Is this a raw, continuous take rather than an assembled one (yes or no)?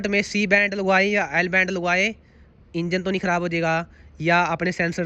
yes